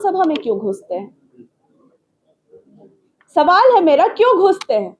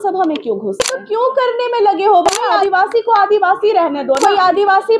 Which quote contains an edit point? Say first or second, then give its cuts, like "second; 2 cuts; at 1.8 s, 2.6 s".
second; 3 cuts; at 1.0 s, 2.6 s, 4.2 s